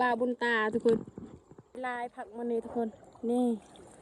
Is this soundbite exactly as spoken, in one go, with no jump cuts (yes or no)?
no